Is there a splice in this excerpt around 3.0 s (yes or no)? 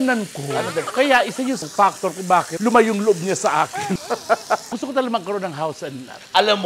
no